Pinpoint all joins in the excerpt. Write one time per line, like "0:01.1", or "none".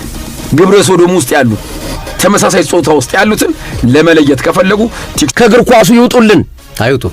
0:05.3